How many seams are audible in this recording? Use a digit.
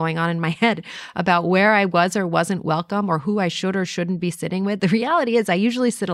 0